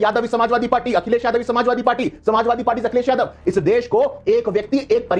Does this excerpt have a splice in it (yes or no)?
no